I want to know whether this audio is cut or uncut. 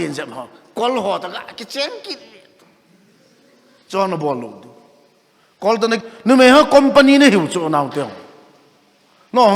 cut